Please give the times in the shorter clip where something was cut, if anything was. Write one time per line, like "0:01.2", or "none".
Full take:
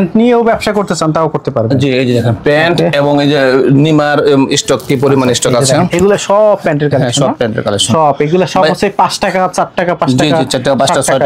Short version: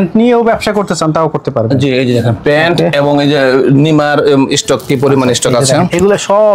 none